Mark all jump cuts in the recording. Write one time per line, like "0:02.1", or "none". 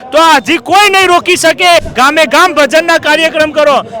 0:01.9